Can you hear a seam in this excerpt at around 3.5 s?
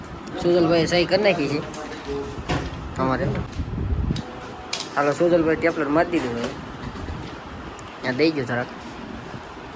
yes; 1 cut; at 3.5 s

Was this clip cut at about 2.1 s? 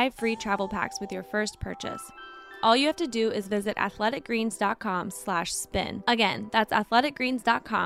no; 0 cuts

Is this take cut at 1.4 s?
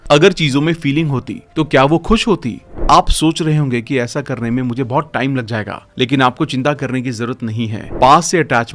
no; 2 cuts; at 2.6 s, 7.8 s

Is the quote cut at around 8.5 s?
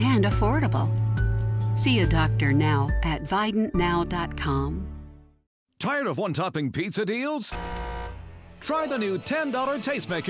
no; 1 cut; at 5.4 s

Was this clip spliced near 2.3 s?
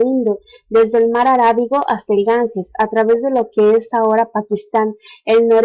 no; 1 cut; at 3.5 s

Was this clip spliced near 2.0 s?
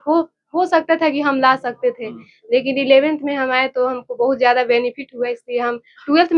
no; 0 cuts

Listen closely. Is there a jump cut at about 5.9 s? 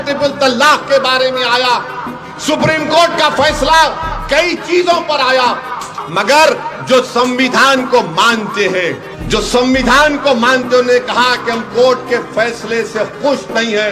yes; 2 cuts; at 5.9 s, 9.1 s

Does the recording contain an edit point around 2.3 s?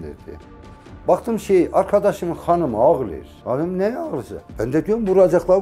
no; 2 cuts; at 0.8 s, 4.5 s

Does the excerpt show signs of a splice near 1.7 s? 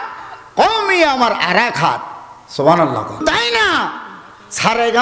no; 1 cut; at 3.2 s

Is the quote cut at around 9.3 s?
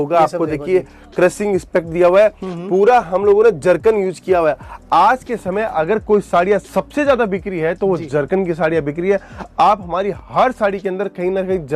no; 0 cuts

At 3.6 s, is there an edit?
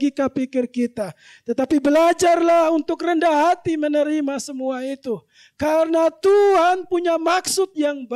no; 0 cuts

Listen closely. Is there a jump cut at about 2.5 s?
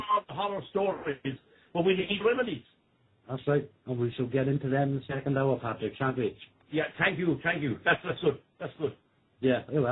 yes; 1 cut; at 2.5 s

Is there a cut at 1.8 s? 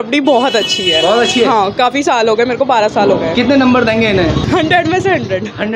no; 1 cut; at 4.4 s

